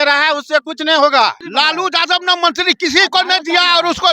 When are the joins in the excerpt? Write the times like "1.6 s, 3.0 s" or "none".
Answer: 1.4 s

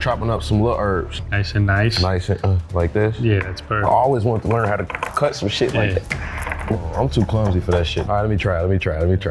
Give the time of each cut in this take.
1.2 s, 6.8 s, 8.1 s

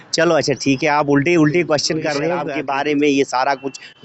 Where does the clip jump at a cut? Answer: 2.4 s

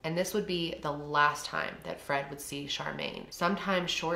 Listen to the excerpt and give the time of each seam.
none

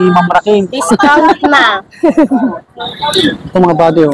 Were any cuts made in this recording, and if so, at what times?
2.9 s

